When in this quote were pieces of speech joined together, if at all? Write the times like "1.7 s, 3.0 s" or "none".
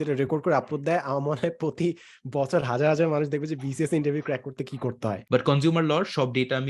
5.2 s

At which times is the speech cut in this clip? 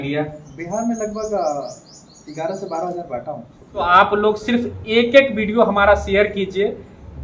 3.8 s

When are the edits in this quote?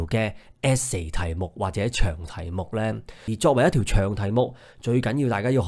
3.1 s

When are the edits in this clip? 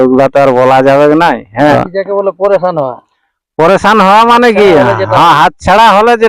1.7 s

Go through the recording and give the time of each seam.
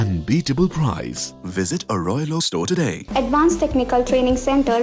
3.0 s

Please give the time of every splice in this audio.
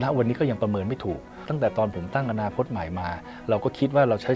1.5 s

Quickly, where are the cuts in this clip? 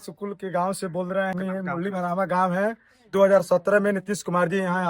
1.3 s

